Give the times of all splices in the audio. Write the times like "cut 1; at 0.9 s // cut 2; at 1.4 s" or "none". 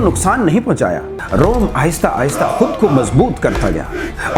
cut 1; at 1.2 s